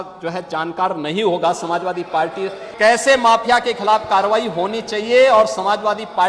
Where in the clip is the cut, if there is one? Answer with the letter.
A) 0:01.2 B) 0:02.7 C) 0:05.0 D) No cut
B